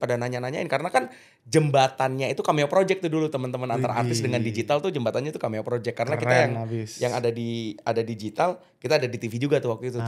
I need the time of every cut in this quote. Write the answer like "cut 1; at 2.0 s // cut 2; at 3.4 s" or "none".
none